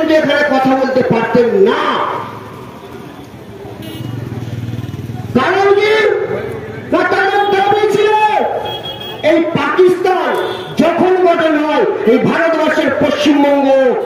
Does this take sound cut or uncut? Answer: uncut